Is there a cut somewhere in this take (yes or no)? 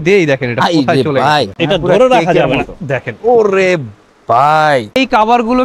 yes